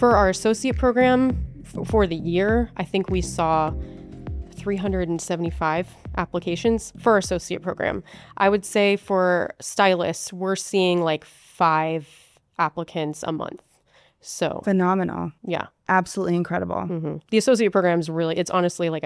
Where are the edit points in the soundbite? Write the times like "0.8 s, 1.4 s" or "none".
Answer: none